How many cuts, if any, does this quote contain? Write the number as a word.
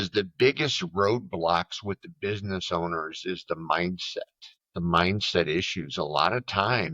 zero